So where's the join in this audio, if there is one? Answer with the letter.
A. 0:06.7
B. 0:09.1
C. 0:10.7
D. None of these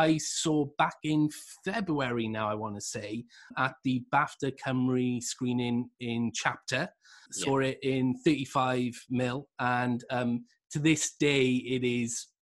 D